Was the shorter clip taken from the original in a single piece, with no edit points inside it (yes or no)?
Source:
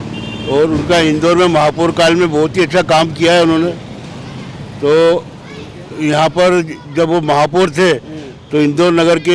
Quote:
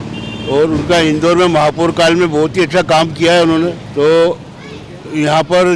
no